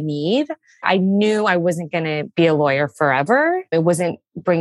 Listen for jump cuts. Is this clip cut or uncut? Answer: cut